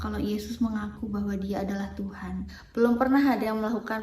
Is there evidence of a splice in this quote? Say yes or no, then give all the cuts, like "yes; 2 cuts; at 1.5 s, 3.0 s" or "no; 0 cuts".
yes; 1 cut; at 2.6 s